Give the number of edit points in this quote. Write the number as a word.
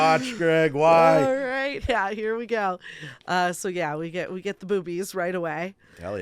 one